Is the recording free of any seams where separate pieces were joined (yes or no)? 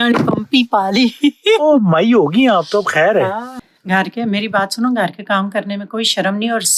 no